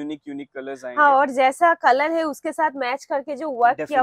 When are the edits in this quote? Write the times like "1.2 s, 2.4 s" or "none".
none